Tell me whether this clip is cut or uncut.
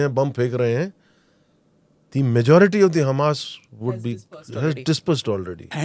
uncut